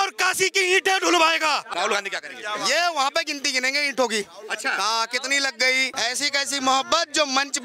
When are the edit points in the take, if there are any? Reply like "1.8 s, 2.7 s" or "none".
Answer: 1.7 s, 5.9 s